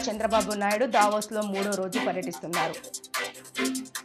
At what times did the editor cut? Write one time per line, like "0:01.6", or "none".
none